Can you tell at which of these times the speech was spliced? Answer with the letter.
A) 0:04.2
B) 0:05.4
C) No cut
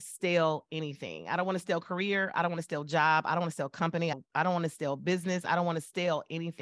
A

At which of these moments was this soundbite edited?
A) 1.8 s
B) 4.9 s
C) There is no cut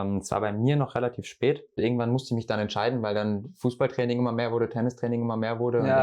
A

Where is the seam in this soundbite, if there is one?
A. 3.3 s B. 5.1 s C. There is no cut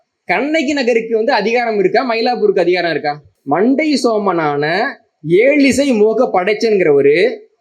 A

